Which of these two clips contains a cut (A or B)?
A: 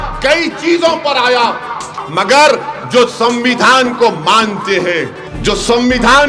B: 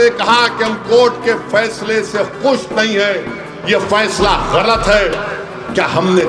A